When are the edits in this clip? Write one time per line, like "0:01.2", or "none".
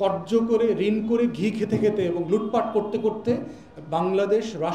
none

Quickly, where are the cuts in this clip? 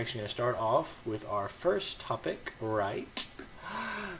0:01.0

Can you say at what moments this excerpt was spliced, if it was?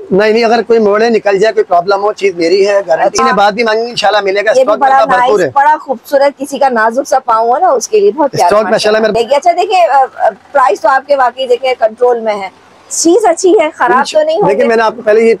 0:03.2
0:09.1

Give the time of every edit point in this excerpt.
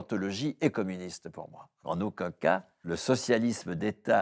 0:01.8
0:02.8

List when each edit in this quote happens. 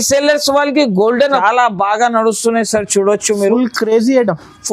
0:01.4

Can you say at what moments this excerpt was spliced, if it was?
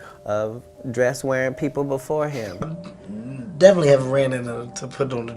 0:02.7

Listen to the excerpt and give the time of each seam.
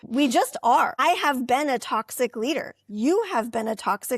0:01.0

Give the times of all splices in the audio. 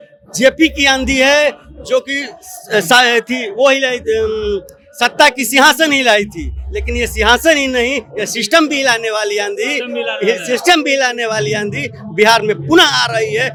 none

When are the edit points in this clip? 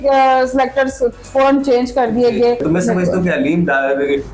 0:02.6

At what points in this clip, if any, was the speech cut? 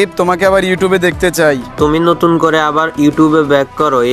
0:01.7

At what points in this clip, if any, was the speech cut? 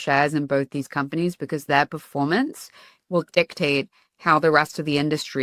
none

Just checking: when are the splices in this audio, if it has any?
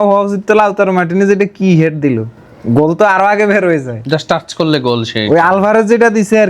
none

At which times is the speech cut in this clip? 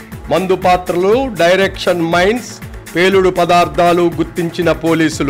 none

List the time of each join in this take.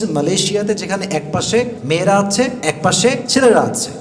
0:01.8
0:03.0

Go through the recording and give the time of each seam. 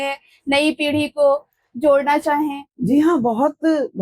0:02.7

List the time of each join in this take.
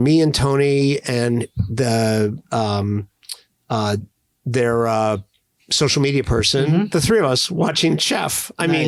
none

